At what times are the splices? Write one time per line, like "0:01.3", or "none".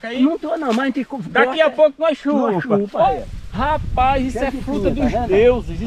0:03.1